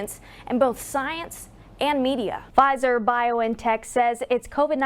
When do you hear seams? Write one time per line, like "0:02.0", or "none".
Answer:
0:02.4